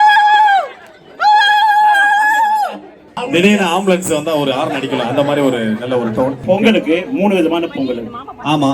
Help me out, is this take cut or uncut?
cut